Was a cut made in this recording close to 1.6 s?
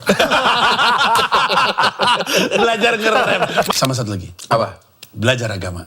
no; 1 cut; at 3.7 s

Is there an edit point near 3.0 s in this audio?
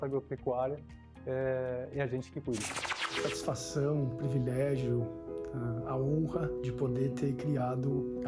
yes; 1 cut; at 3.0 s

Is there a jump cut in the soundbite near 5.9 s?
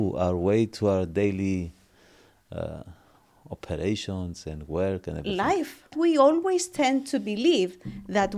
yes; 1 cut; at 5.9 s

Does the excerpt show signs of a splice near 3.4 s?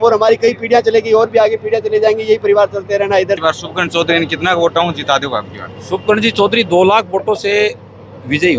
yes; 1 cut; at 3.4 s

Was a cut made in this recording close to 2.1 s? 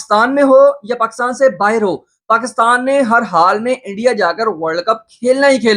no; 0 cuts

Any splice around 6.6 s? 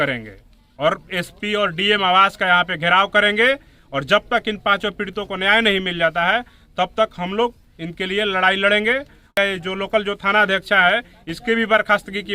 no; 1 cut; at 9.3 s

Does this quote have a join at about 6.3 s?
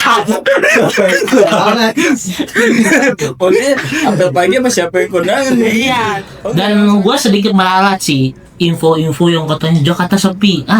yes; 1 cut; at 6.3 s

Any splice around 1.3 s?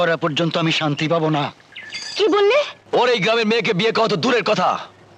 no; 1 cut; at 2.8 s

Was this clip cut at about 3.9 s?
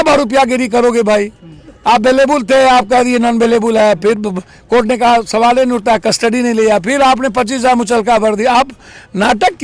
no; 0 cuts

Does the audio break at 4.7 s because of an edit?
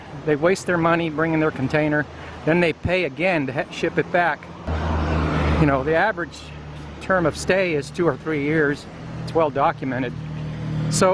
yes; 1 cut; at 4.7 s

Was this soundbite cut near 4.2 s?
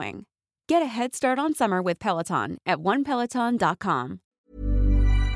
yes; 1 cut; at 4.2 s

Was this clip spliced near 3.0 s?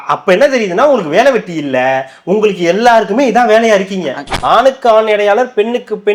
no; 1 cut; at 4.3 s

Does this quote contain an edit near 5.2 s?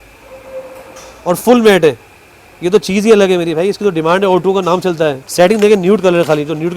yes; 1 cut; at 5.2 s

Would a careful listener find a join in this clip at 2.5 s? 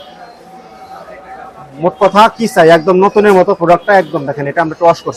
no; 0 cuts

